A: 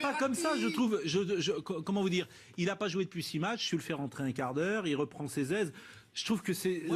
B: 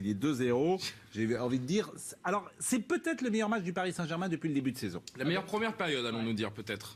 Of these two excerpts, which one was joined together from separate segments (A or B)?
B